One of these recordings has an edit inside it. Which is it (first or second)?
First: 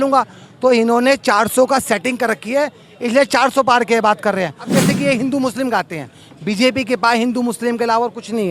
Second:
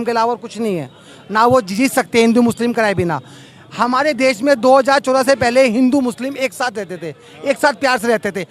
first